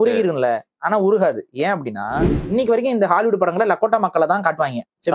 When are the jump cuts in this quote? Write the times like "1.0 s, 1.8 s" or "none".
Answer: 2.4 s